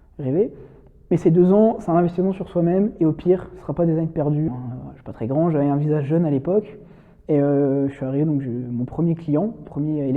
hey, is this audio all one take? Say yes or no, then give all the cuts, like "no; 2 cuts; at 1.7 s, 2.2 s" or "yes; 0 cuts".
no; 1 cut; at 4.5 s